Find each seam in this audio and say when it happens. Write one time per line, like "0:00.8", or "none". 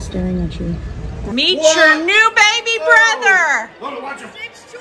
0:01.3